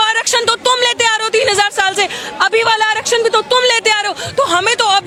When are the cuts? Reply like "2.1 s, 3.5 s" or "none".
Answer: none